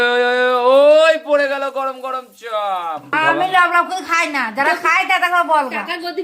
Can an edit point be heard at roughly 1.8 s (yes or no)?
no